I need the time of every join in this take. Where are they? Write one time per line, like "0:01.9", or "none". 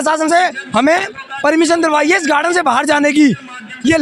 none